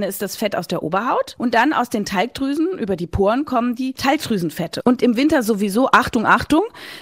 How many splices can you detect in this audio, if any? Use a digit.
2